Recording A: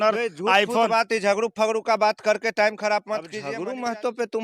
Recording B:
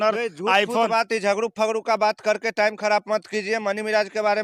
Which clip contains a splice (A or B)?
A